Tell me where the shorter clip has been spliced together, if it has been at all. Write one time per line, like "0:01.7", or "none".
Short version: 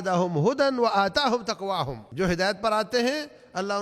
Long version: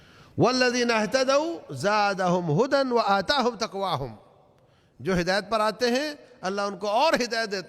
0:02.0